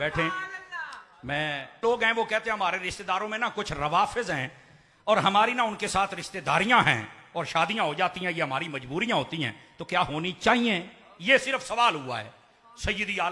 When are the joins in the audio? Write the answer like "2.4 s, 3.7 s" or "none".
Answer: 1.8 s